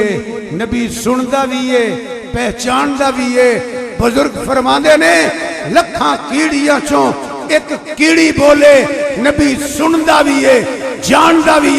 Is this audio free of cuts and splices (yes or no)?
yes